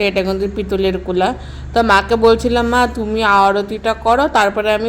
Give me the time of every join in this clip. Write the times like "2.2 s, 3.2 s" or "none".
none